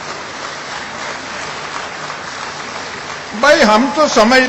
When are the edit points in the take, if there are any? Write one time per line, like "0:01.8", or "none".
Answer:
none